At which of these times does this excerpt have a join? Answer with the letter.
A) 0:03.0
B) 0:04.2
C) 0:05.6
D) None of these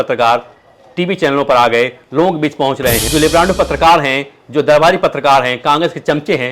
A